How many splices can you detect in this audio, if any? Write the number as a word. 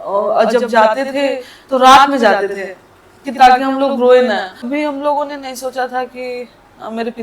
one